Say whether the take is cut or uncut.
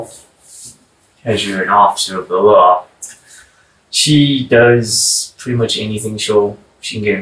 uncut